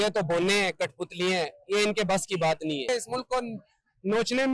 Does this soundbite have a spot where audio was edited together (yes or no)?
yes